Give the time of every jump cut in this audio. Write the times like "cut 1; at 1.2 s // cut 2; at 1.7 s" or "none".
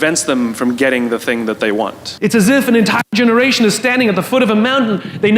cut 1; at 2.0 s